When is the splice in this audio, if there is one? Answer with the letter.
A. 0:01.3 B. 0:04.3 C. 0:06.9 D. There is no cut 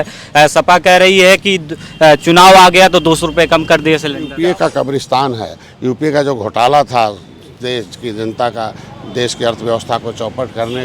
B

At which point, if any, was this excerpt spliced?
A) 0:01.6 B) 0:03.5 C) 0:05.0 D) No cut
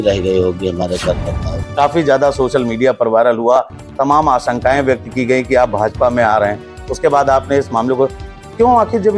A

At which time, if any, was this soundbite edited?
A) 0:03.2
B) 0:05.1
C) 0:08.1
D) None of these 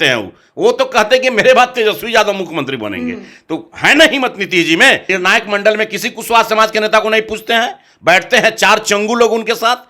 B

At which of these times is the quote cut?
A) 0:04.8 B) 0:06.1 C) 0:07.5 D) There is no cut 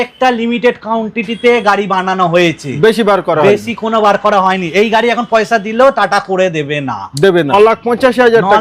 C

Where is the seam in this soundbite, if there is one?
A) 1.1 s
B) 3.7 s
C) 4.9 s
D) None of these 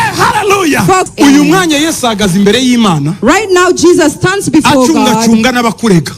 A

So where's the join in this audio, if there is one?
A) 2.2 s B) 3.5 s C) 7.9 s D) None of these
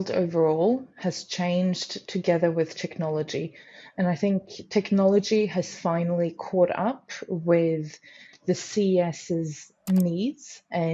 D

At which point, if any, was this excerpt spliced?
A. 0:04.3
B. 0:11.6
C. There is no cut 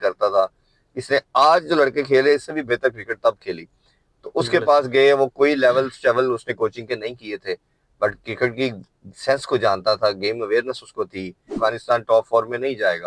B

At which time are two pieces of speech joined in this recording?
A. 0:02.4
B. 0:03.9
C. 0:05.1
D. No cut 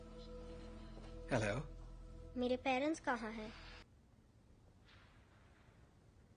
B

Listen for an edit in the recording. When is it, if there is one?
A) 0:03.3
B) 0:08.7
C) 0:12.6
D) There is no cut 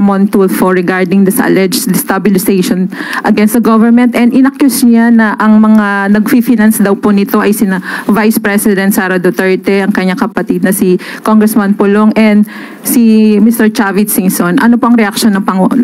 D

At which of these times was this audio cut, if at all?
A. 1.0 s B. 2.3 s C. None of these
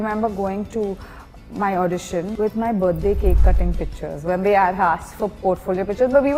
B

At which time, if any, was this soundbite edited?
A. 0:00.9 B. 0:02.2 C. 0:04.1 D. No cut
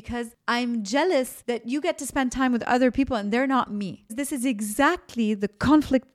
C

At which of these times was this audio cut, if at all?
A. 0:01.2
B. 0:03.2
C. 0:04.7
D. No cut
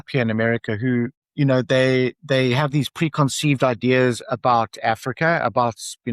A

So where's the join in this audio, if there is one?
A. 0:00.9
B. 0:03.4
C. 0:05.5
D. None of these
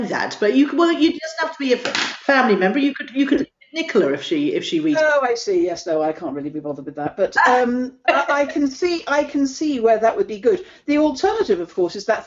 D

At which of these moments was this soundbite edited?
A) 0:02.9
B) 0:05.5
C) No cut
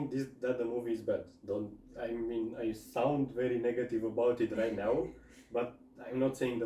C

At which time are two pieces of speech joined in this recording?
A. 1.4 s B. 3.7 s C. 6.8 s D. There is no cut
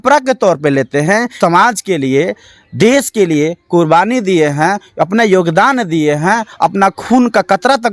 A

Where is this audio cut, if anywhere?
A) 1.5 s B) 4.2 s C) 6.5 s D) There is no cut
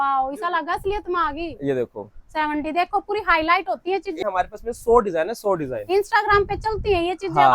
B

